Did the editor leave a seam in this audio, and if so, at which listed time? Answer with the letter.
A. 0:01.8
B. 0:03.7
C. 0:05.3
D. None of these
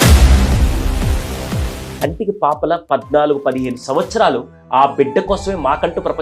A